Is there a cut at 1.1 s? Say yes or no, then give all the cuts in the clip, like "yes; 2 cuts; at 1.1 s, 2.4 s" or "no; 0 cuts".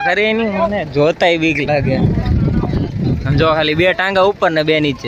no; 0 cuts